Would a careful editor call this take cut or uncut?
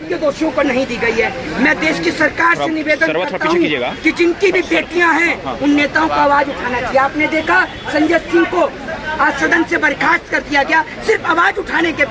uncut